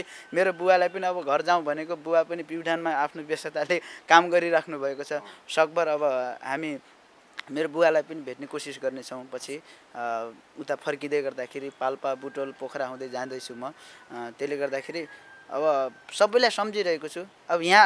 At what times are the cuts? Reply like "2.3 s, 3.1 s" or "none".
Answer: none